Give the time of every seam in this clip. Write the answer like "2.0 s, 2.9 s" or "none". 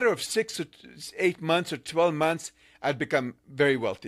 none